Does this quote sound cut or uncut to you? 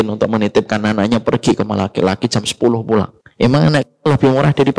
cut